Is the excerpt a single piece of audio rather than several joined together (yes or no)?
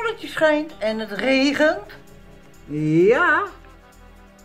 yes